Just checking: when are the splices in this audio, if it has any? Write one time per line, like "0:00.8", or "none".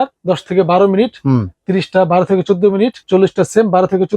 none